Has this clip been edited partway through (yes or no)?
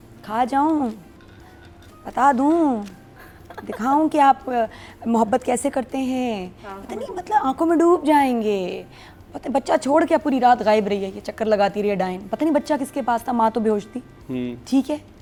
no